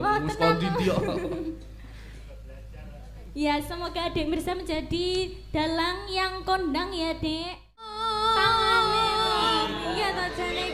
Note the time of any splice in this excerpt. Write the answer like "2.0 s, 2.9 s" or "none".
7.9 s

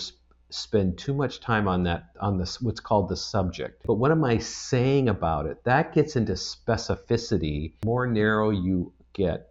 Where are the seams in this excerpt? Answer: 3.7 s, 7.8 s

